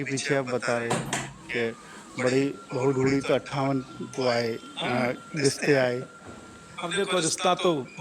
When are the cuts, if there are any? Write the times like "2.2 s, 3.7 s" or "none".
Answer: none

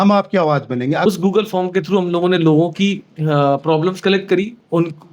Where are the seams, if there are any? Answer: 1.0 s

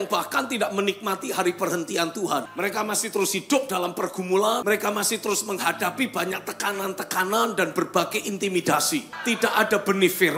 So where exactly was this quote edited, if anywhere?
2.5 s, 4.6 s, 9.1 s

